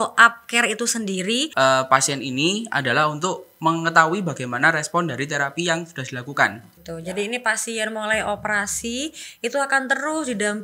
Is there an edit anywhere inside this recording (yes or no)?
yes